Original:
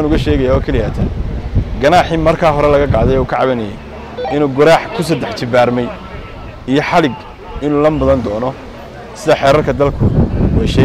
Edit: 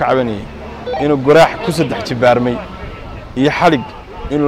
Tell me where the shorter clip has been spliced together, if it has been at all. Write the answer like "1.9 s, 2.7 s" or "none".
none